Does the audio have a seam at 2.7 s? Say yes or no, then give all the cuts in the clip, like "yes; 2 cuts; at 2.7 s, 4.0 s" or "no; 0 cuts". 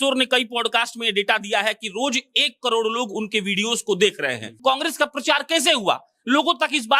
no; 1 cut; at 4.5 s